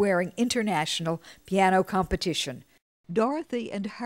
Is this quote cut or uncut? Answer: cut